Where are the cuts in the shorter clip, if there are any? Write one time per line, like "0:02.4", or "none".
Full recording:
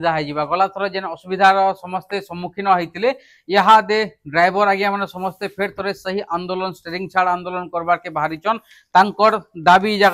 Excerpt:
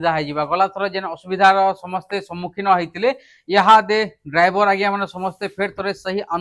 none